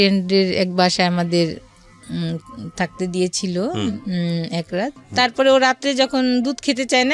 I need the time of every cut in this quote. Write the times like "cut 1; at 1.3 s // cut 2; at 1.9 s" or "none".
cut 1; at 5.0 s